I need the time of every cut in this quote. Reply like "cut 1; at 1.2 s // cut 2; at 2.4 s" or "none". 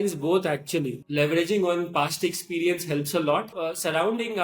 cut 1; at 1.0 s // cut 2; at 3.5 s